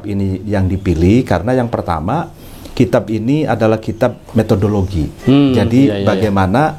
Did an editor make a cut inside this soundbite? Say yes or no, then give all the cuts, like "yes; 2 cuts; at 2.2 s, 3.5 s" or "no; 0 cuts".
no; 0 cuts